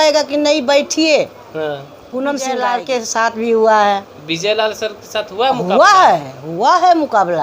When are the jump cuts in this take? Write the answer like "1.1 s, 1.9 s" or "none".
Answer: 2.4 s